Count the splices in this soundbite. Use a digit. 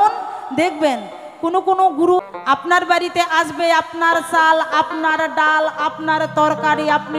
1